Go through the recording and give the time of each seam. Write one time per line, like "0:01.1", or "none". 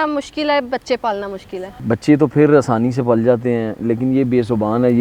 0:01.8